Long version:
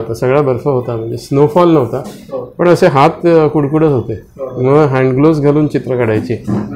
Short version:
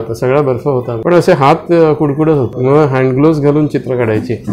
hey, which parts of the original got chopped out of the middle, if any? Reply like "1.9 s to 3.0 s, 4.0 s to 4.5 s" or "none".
0.9 s to 2.5 s, 4.1 s to 4.5 s